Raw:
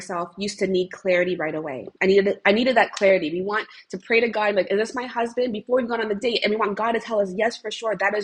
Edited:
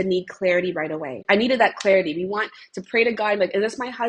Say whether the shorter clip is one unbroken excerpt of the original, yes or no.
no